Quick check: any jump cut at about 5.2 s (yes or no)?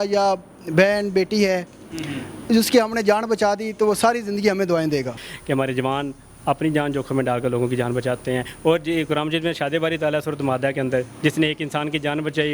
yes